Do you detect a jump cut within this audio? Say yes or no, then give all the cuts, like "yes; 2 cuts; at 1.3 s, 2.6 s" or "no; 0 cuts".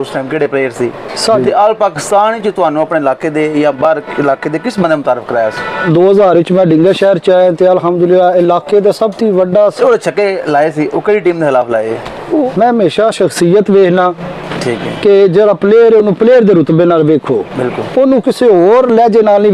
yes; 4 cuts; at 1.2 s, 5.8 s, 9.7 s, 12.5 s